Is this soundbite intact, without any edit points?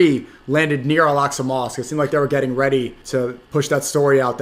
no; 1 cut; at 3.1 s

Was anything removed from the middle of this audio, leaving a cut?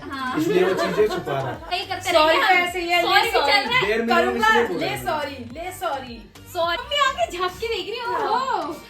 yes; 2 cuts; at 1.7 s, 6.8 s

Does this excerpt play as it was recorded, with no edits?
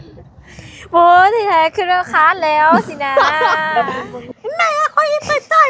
no; 1 cut; at 4.1 s

